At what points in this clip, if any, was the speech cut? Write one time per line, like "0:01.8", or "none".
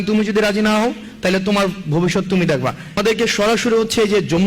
0:03.0